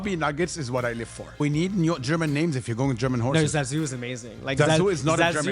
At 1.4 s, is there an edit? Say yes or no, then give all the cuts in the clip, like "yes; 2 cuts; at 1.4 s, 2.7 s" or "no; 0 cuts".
yes; 1 cut; at 1.4 s